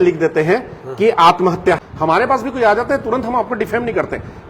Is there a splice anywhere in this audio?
yes; 1 cut; at 1.9 s

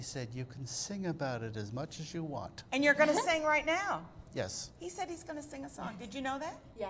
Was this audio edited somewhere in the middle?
yes; 1 cut; at 1.6 s

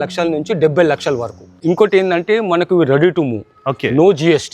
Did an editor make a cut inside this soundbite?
yes; 1 cut; at 1.4 s

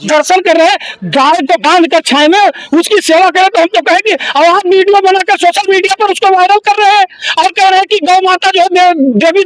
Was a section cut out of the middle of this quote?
no; 0 cuts

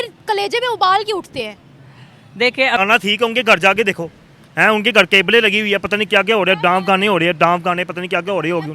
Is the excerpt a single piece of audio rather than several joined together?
no; 1 cut; at 2.8 s

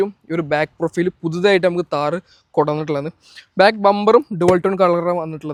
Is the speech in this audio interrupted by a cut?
no; 0 cuts

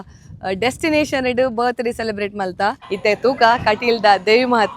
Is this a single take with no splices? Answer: no; 1 cut; at 2.9 s

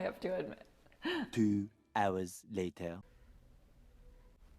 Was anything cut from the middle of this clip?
yes; 1 cut; at 1.3 s

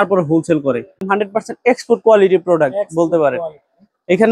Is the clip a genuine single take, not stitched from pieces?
no; 1 cut; at 1.0 s

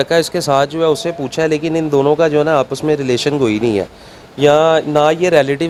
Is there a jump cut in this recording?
no; 0 cuts

